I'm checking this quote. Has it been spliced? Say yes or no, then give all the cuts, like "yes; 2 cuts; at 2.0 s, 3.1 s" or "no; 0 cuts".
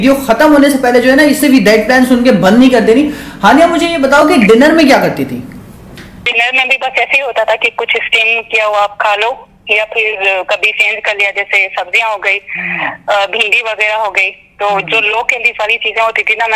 no; 0 cuts